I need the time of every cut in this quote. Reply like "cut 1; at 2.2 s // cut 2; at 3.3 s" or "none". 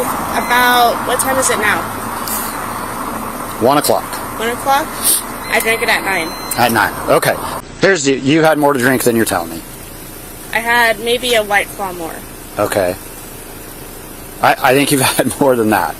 cut 1; at 7.5 s